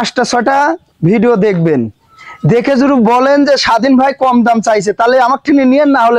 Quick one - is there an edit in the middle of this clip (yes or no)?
no